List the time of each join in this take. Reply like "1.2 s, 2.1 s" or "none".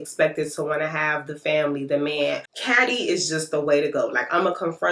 2.5 s